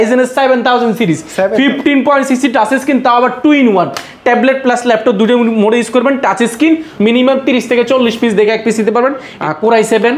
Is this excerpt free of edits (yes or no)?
no